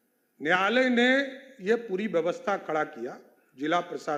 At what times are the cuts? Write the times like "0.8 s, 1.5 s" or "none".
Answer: none

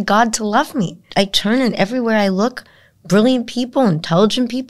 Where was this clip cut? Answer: 1.0 s

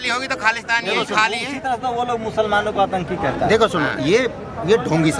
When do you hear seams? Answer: none

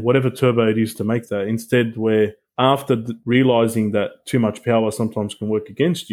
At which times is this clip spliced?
none

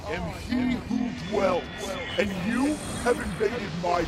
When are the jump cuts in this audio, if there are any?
none

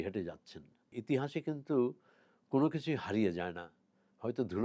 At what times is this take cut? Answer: 1.0 s

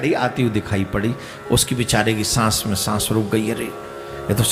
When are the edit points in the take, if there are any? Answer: none

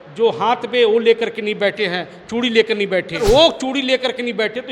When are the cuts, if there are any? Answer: 3.2 s

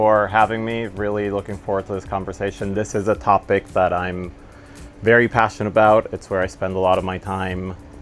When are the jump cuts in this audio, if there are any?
none

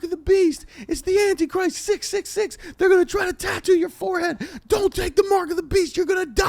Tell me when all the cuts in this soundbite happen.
none

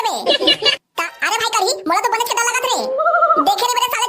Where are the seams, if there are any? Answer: 0.9 s

